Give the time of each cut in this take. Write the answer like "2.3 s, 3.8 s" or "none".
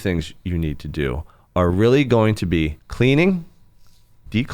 2.8 s

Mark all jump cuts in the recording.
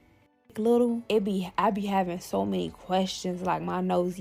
1.0 s

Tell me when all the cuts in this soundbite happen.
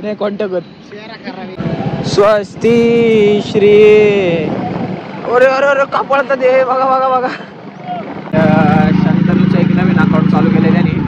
1.6 s, 8.3 s

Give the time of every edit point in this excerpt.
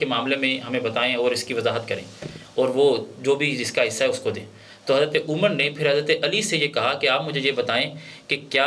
none

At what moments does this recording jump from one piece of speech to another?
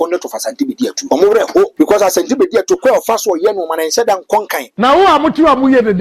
1.0 s, 1.7 s, 4.6 s

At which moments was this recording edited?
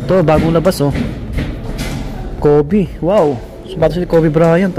none

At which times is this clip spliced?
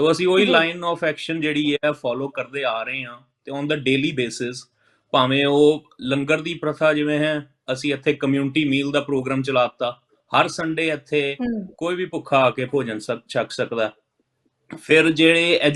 none

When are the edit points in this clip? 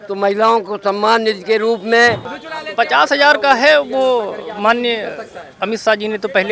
2.3 s

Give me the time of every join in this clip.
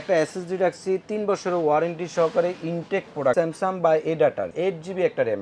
3.3 s, 4.5 s

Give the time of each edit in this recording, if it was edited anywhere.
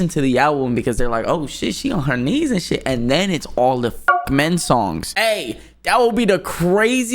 5.1 s

